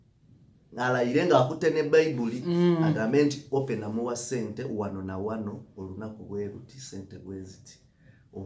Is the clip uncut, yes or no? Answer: yes